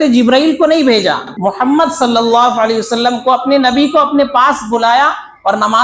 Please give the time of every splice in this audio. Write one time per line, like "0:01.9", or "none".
0:01.3